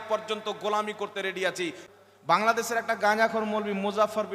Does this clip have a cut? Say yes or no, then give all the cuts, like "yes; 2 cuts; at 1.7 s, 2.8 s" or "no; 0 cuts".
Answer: yes; 1 cut; at 1.8 s